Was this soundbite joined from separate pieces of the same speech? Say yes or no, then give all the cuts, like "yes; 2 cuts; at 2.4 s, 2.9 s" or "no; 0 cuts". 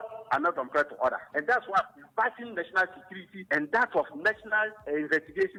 no; 0 cuts